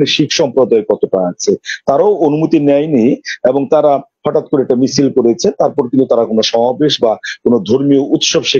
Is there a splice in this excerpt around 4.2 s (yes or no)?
no